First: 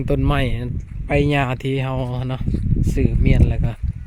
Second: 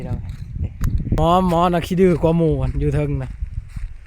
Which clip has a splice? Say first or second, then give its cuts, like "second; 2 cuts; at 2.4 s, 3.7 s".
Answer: second; 1 cut; at 1.2 s